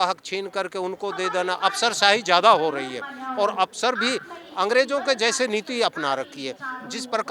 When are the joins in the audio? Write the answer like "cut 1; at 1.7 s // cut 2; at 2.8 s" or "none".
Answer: none